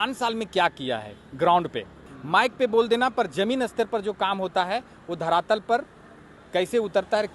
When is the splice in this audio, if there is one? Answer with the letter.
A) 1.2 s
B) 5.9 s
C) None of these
C